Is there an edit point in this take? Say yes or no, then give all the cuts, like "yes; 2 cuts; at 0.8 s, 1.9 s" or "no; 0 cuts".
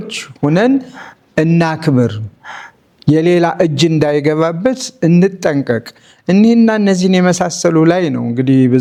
no; 0 cuts